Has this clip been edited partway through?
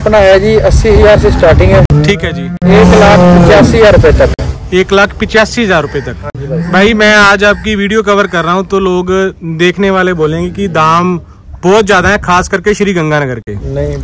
no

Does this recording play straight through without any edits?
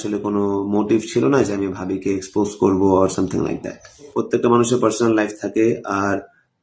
no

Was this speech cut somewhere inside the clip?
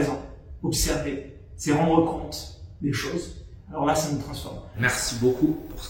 yes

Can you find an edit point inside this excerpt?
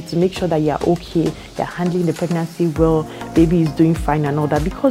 no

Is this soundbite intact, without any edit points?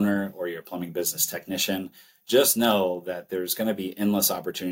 yes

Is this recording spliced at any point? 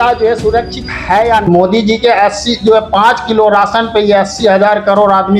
yes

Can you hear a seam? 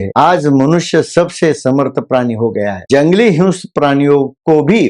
yes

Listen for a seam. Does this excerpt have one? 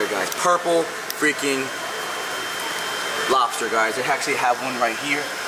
no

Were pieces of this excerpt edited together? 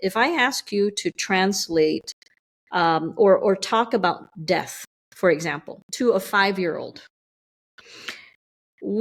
no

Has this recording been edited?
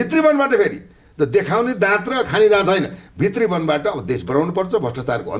no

